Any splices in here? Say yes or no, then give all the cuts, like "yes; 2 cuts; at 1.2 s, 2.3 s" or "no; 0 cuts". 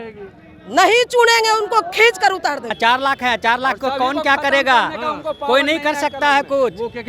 yes; 1 cut; at 2.7 s